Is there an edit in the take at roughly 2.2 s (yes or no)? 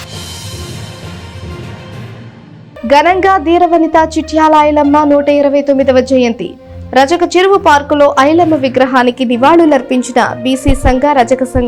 yes